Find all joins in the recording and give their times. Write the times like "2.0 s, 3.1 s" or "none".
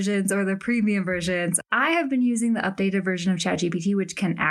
1.6 s